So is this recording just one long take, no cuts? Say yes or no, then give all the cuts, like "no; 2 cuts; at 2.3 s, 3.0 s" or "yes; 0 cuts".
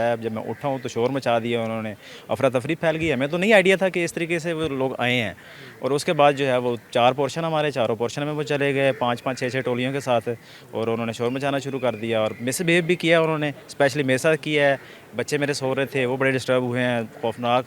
yes; 0 cuts